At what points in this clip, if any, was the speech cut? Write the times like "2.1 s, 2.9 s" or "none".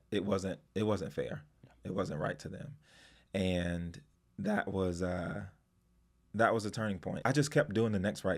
7.2 s